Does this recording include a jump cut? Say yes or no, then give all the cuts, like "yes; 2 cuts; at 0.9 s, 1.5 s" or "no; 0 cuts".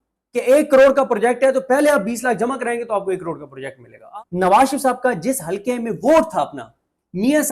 yes; 1 cut; at 4.0 s